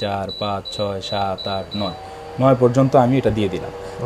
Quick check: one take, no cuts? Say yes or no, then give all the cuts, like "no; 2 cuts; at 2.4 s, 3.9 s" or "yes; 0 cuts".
yes; 0 cuts